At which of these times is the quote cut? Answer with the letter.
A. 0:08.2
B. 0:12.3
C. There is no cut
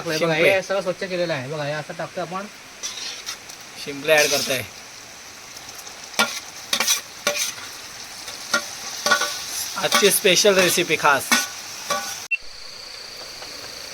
B